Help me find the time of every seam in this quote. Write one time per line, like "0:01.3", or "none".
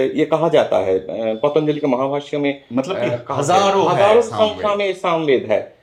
none